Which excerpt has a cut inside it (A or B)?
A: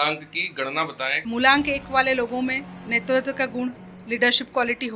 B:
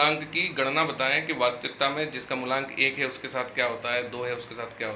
A